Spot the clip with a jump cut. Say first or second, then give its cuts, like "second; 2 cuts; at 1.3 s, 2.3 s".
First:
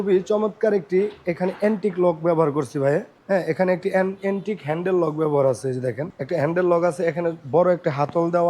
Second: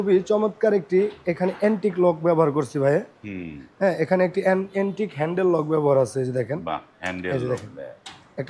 first; 2 cuts; at 3.1 s, 6.1 s